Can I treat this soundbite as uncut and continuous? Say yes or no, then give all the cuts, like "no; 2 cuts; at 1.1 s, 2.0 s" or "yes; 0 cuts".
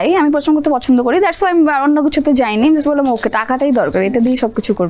yes; 0 cuts